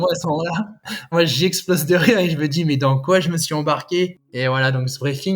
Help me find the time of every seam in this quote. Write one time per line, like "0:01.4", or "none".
0:01.1
0:04.2